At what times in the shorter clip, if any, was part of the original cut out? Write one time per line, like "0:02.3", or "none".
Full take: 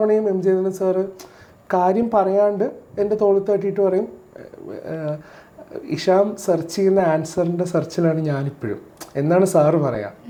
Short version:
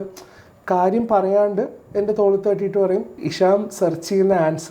0:03.2